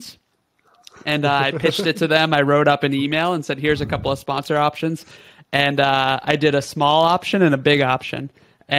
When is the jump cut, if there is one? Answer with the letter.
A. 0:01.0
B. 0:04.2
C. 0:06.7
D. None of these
D